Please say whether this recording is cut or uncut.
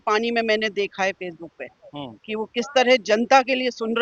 uncut